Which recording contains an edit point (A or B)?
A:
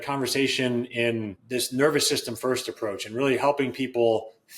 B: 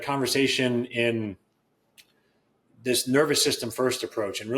A